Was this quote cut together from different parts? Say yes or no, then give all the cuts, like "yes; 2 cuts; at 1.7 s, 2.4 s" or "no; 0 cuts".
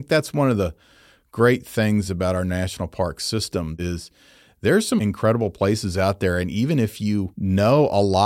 yes; 2 cuts; at 3.6 s, 7.3 s